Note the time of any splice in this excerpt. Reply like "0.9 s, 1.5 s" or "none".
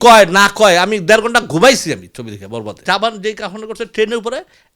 2.8 s